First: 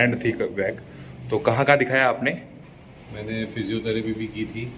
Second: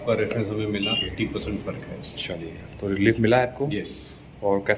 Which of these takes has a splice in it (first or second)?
second